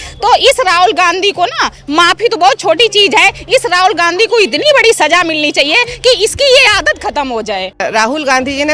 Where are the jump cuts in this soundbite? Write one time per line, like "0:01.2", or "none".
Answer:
0:07.8